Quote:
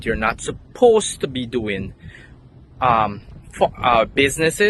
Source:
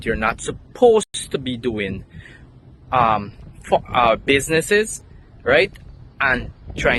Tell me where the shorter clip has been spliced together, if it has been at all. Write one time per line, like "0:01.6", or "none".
0:01.1